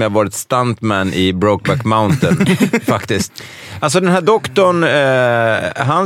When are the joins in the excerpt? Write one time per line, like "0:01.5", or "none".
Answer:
0:03.3